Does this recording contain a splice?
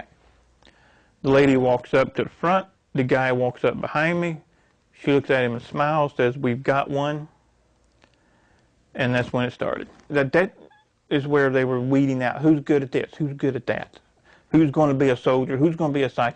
yes; 1 cut; at 10.1 s

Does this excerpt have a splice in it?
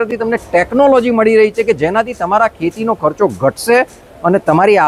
no; 0 cuts

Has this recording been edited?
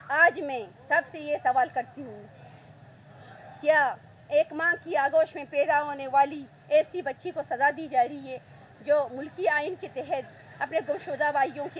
no; 0 cuts

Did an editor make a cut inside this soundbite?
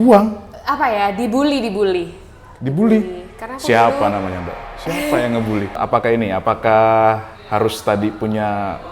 yes; 1 cut; at 5.8 s

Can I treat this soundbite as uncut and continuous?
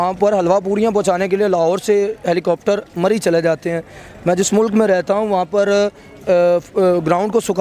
yes; 0 cuts

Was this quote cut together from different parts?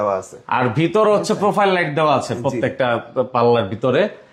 no; 0 cuts

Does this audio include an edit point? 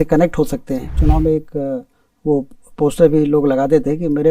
yes; 1 cut; at 1.0 s

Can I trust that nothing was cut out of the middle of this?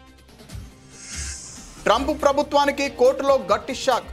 no; 1 cut; at 1.5 s

